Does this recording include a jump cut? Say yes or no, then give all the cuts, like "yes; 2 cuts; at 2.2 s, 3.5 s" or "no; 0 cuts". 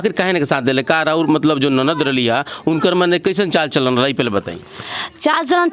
no; 0 cuts